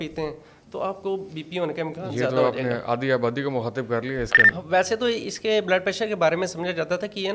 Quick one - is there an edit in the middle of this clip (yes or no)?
yes